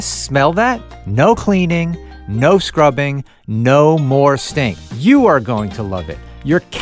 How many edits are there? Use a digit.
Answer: 2